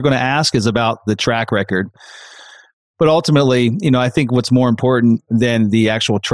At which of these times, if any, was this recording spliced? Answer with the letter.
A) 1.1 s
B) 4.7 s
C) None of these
A